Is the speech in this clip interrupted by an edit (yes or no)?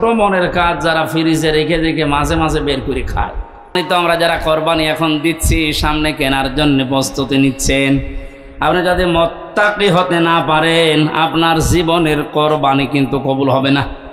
yes